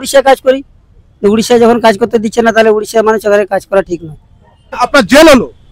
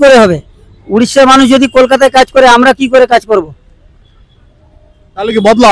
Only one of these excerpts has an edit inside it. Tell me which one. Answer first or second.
first